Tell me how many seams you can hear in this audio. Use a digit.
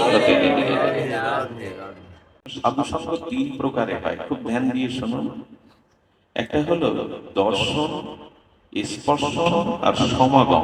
1